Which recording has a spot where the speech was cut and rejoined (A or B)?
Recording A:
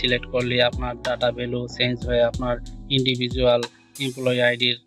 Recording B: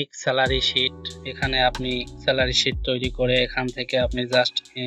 B